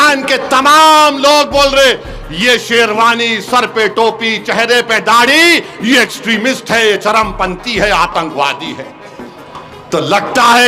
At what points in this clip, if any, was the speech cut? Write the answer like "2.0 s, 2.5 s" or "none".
none